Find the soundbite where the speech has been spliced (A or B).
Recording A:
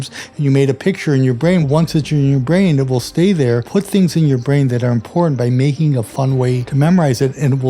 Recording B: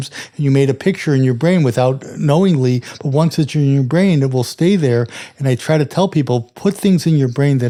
A